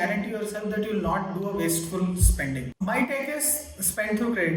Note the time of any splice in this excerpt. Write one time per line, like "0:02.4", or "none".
0:02.8

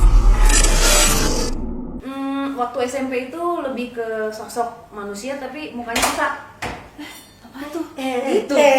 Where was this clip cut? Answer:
0:02.0
0:06.5
0:07.8

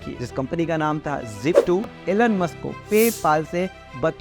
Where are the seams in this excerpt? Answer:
0:01.9

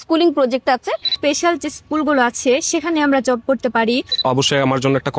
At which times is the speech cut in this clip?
0:01.1
0:04.2

